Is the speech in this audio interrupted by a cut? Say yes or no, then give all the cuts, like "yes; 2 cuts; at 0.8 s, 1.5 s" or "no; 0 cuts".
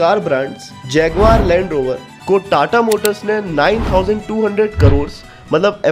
yes; 1 cut; at 2.1 s